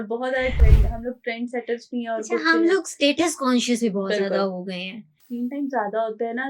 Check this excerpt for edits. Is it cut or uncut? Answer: cut